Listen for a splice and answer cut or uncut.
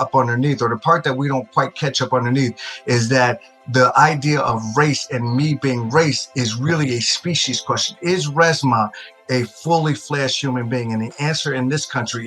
uncut